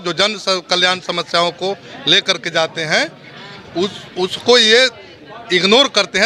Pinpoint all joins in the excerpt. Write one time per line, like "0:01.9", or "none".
none